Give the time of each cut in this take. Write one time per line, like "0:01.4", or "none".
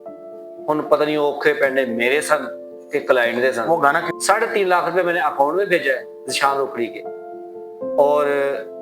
0:04.2